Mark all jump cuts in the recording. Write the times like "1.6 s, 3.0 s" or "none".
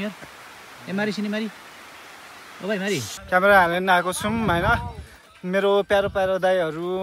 3.1 s